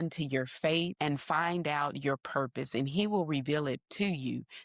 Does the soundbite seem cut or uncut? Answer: cut